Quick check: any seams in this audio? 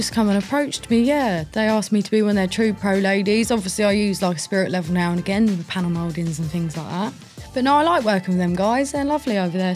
no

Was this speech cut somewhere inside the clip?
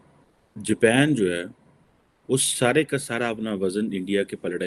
no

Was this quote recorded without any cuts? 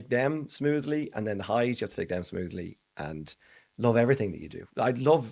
yes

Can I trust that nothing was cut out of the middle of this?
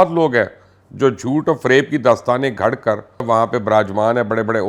no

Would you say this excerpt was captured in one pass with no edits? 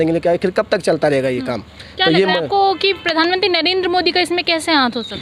yes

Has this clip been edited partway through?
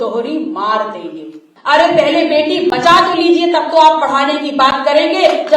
yes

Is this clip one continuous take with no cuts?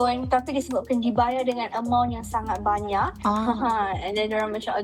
yes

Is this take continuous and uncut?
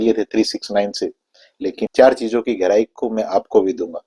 no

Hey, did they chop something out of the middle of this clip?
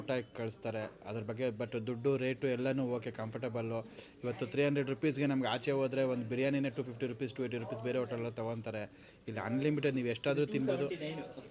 no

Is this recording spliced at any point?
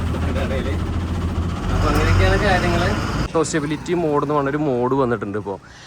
yes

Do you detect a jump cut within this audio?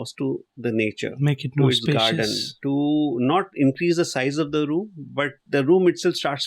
yes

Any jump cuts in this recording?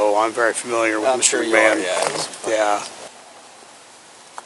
no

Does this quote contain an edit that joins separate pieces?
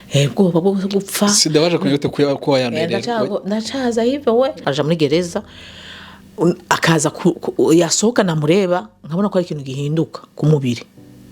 yes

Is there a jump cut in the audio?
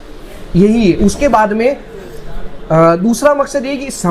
no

